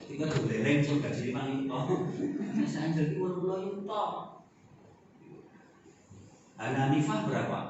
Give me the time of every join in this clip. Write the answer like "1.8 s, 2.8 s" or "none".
none